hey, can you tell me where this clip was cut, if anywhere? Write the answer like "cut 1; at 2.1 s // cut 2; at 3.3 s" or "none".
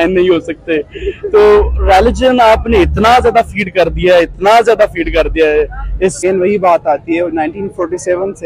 cut 1; at 6.2 s